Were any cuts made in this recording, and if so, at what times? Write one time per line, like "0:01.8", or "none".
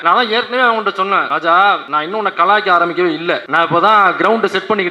0:01.3
0:01.9
0:03.5